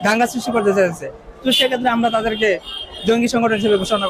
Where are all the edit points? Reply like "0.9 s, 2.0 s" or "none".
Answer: none